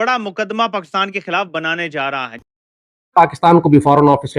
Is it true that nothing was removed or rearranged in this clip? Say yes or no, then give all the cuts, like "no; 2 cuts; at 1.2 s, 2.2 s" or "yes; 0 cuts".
no; 1 cut; at 2.4 s